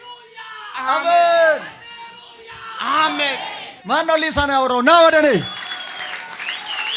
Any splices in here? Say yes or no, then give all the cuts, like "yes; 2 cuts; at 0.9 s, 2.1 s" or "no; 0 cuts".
no; 0 cuts